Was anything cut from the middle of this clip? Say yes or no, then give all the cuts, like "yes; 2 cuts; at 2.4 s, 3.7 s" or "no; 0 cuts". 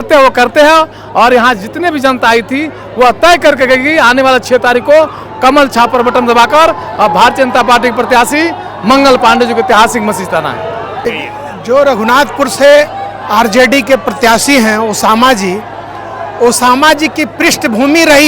yes; 1 cut; at 11.0 s